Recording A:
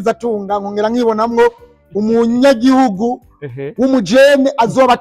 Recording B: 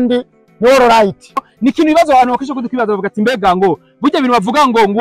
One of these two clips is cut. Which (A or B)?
B